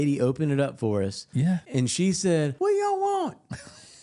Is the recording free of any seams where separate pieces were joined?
no; 2 cuts; at 1.6 s, 2.5 s

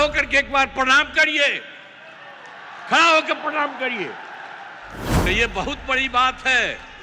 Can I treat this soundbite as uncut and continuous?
yes; 0 cuts

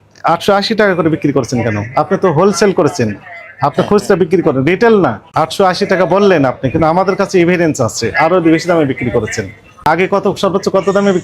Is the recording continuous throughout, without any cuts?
no; 2 cuts; at 5.2 s, 9.9 s

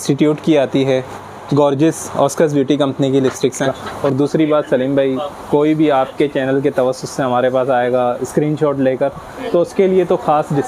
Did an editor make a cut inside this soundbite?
yes; 1 cut; at 3.8 s

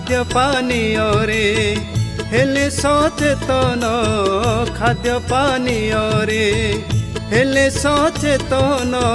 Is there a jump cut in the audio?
no; 0 cuts

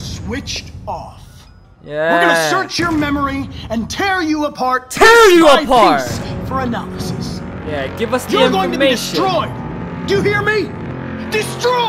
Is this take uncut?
yes; 0 cuts

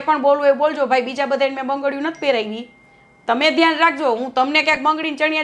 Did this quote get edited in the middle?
no; 0 cuts

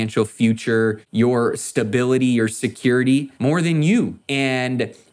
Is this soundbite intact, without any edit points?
no; 3 cuts; at 1.0 s, 3.3 s, 4.2 s

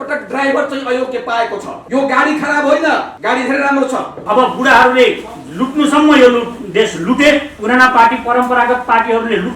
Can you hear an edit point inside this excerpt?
yes; 3 cuts; at 1.7 s, 3.1 s, 4.2 s

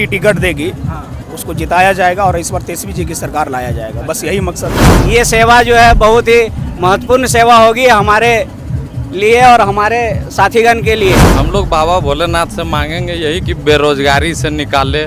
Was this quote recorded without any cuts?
no; 2 cuts; at 4.9 s, 11.3 s

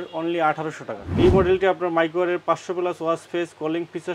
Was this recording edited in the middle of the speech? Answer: yes; 1 cut; at 1.0 s

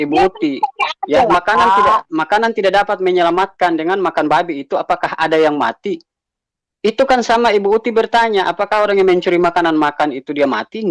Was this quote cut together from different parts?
no; 0 cuts

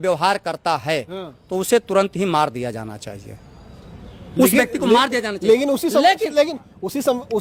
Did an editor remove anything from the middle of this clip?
no; 0 cuts

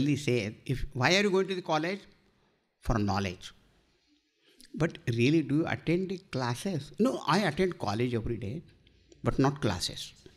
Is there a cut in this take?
no; 0 cuts

